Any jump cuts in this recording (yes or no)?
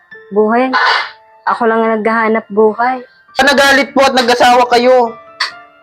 yes